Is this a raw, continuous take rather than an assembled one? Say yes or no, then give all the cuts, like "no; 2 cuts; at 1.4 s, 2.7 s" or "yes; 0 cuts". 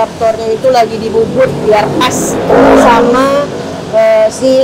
yes; 0 cuts